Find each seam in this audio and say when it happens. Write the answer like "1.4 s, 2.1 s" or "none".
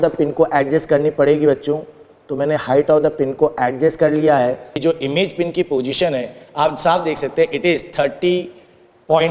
4.7 s